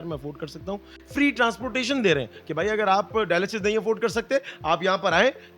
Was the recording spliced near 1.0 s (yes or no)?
yes